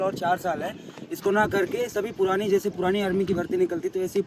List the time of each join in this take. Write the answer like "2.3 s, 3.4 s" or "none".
none